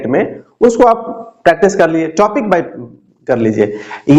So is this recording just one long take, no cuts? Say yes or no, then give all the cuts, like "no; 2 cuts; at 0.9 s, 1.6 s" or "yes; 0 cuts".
yes; 0 cuts